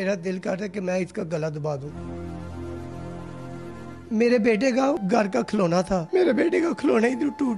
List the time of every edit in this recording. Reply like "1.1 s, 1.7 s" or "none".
1.9 s, 4.0 s, 5.0 s

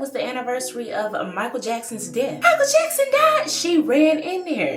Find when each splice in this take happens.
2.4 s

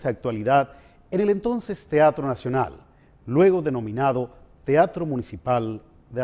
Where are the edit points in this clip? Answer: 1.7 s

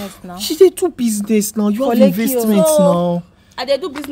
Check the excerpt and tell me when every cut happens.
none

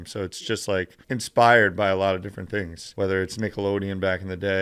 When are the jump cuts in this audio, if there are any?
1.0 s, 2.8 s

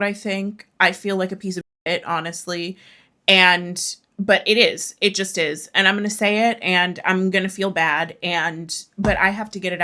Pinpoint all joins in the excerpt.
none

